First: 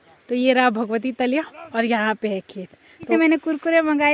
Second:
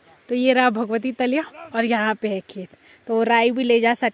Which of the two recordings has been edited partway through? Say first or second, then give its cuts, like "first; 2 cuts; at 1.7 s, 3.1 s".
first; 1 cut; at 3.1 s